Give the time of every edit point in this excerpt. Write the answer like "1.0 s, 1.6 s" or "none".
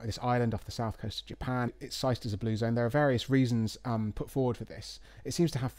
1.8 s

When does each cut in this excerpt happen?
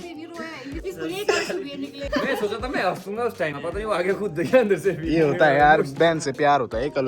0.8 s, 2.0 s, 3.6 s, 5.9 s

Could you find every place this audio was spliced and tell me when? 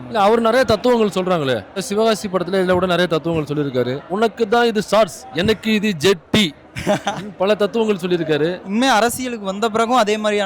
1.9 s, 4.1 s, 8.6 s

